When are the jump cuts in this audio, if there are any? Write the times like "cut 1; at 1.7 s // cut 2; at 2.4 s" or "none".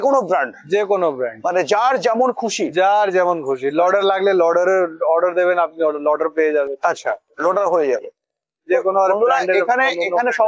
none

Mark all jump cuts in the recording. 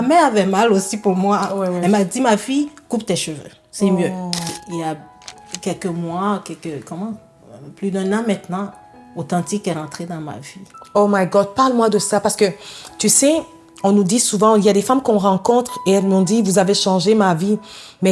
cut 1; at 4.6 s

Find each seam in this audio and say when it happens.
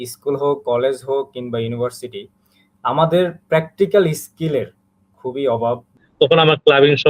cut 1; at 6.0 s

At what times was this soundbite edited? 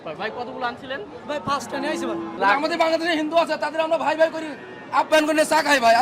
cut 1; at 2.3 s

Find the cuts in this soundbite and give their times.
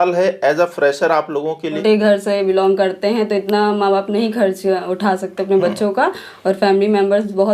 cut 1; at 1.8 s

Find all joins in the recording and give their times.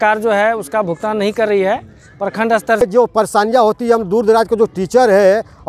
cut 1; at 2.8 s

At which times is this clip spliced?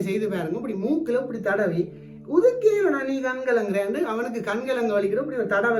none

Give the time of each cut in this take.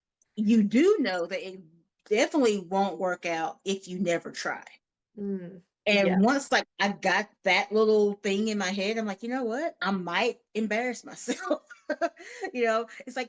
cut 1; at 9.8 s

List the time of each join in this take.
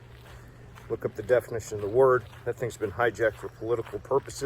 cut 1; at 2.7 s

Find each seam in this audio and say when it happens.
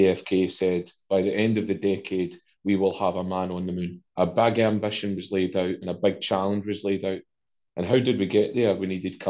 cut 1; at 4.0 s

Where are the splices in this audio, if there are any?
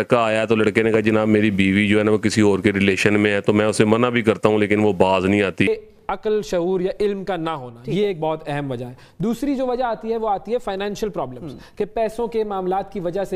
cut 1; at 5.7 s

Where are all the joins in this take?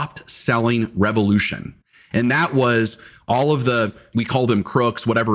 cut 1; at 4.1 s

